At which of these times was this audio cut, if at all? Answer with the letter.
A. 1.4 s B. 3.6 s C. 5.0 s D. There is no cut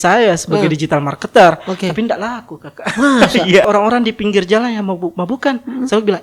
B